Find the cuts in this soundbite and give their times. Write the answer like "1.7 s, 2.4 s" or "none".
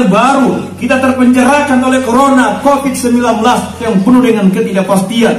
3.8 s